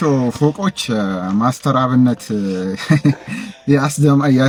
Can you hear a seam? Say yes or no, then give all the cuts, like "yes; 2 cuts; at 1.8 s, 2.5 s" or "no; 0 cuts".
no; 0 cuts